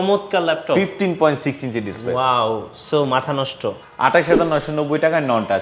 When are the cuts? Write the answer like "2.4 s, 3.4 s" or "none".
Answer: 3.8 s